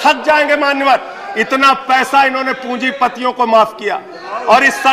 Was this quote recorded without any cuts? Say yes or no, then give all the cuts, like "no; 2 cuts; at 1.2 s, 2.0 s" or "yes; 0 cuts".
yes; 0 cuts